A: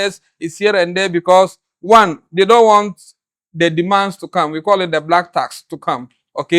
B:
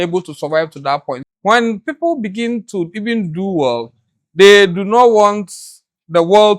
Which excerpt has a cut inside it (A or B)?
B